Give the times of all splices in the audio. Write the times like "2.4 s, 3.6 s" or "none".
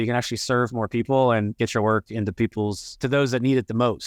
2.9 s

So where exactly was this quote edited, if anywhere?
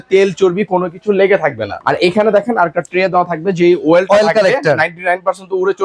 1.7 s

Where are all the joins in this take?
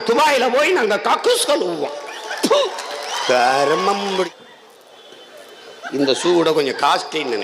4.3 s

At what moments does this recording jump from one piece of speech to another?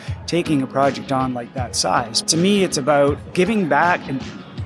2.1 s, 3.2 s

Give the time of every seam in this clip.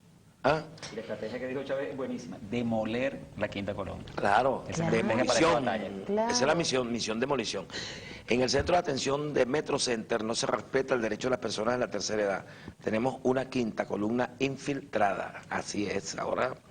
7.1 s

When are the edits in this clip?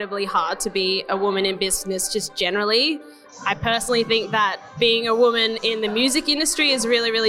none

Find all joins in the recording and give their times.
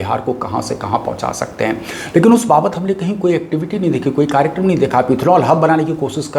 none

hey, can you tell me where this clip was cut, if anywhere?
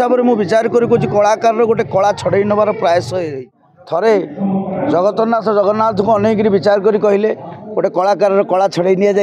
3.6 s

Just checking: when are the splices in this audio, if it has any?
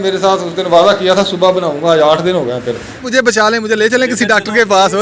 3.2 s

